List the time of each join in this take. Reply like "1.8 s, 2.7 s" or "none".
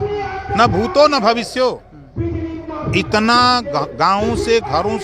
none